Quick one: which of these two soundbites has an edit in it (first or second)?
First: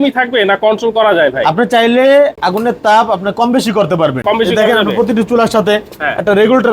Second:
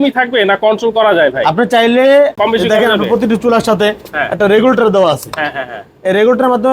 second